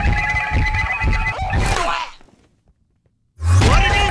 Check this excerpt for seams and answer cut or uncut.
uncut